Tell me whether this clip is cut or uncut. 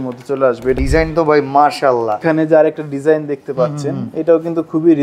cut